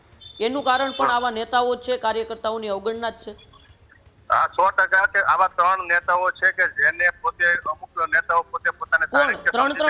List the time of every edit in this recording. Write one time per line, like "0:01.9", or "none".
none